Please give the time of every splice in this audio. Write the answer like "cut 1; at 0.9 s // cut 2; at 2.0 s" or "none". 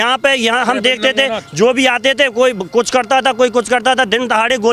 none